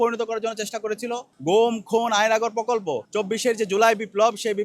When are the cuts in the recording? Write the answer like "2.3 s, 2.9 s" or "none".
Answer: 1.3 s, 3.0 s